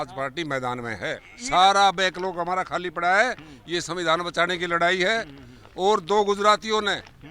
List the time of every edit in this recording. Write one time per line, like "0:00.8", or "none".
0:01.3